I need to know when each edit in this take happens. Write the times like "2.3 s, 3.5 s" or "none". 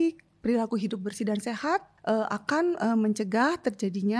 1.9 s

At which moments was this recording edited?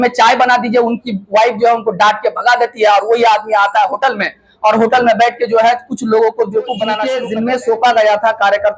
7.1 s

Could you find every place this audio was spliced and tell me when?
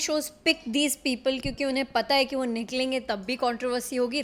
none

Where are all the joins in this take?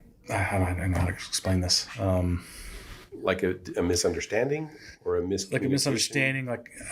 none

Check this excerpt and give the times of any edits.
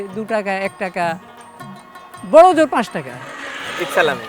none

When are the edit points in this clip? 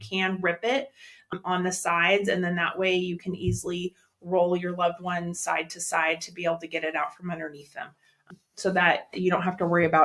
1.3 s, 8.3 s

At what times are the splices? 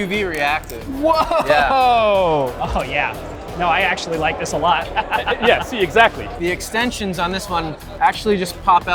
2.5 s, 6.3 s

